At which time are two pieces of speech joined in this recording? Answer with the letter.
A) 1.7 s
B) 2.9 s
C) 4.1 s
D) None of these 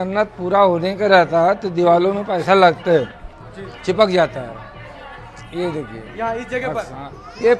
D